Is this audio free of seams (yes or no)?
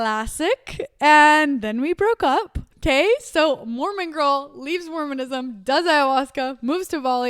no